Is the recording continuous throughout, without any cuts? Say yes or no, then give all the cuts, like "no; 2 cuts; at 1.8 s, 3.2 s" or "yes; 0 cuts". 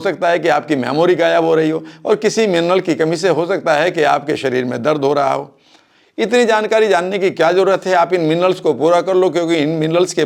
yes; 0 cuts